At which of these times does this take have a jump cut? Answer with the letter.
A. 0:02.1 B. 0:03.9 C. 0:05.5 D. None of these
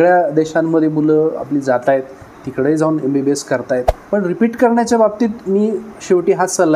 B